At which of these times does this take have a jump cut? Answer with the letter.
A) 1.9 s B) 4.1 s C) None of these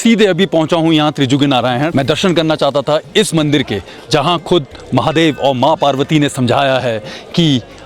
A